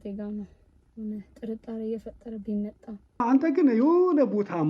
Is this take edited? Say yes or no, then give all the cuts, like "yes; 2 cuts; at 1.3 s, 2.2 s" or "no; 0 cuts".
yes; 1 cut; at 3.2 s